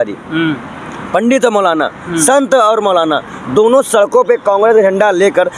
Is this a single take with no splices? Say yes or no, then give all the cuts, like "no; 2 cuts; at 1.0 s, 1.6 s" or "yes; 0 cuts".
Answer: yes; 0 cuts